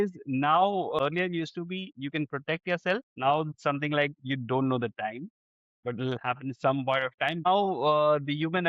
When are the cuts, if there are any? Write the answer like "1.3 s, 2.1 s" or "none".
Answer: 1.0 s, 3.1 s, 7.5 s